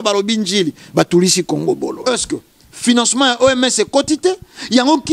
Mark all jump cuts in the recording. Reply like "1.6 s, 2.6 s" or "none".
2.0 s